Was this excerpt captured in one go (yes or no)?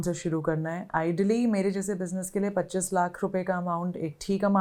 yes